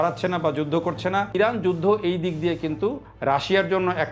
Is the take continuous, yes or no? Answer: no